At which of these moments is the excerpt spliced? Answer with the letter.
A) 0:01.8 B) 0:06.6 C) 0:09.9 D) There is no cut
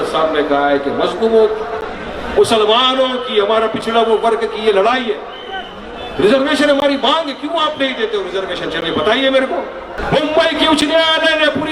C